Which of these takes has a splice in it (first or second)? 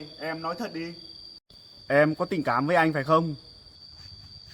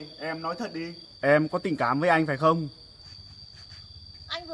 second